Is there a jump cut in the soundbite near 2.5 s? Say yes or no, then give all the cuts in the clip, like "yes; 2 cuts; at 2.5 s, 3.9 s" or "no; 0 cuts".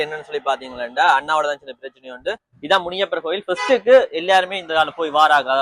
yes; 1 cut; at 2.5 s